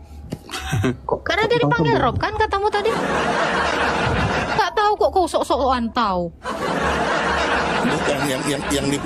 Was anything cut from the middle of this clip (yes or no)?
yes